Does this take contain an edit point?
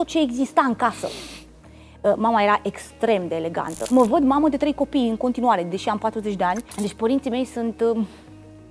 yes; 2 cuts; at 3.8 s, 6.7 s

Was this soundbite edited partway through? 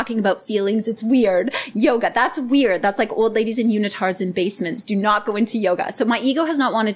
no; 0 cuts

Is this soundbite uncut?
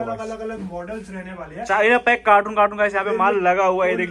yes; 0 cuts

